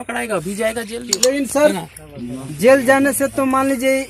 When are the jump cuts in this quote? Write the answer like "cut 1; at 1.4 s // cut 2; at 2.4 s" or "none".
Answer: cut 1; at 1.0 s